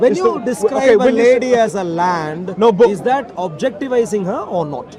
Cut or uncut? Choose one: uncut